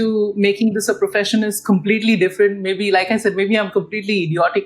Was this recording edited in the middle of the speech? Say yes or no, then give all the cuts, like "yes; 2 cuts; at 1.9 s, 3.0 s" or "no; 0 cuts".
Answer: no; 0 cuts